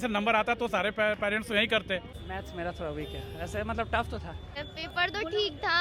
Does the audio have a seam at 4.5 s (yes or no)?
yes